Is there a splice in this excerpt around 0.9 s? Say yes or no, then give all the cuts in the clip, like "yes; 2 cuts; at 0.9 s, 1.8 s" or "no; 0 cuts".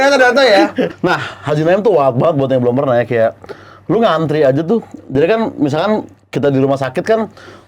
yes; 1 cut; at 0.9 s